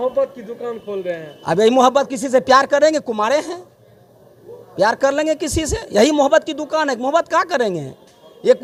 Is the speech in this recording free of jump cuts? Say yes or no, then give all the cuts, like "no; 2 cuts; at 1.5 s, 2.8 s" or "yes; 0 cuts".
yes; 0 cuts